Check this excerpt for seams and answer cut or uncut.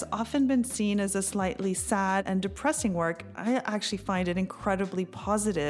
cut